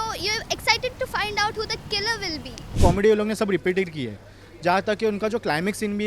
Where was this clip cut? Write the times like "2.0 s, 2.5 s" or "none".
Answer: 2.7 s